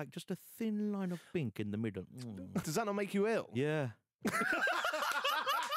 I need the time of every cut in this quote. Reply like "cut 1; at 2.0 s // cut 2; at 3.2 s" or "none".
cut 1; at 2.7 s